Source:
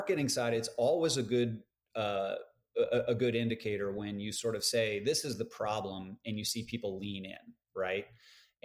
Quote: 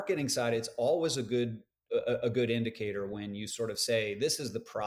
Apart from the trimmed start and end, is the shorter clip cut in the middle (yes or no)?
yes